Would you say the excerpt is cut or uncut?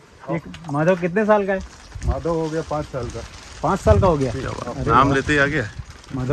uncut